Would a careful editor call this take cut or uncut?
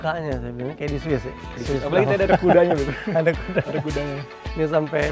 uncut